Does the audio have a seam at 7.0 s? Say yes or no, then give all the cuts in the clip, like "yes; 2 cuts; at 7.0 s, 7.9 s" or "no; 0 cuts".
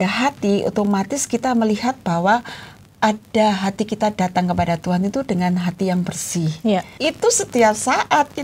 yes; 1 cut; at 7.0 s